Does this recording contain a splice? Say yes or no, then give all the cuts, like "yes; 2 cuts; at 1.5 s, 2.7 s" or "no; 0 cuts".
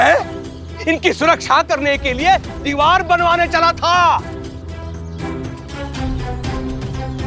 no; 0 cuts